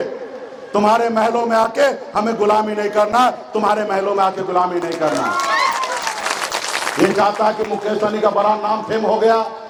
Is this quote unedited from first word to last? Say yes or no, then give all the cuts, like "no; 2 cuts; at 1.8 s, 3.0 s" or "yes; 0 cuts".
yes; 0 cuts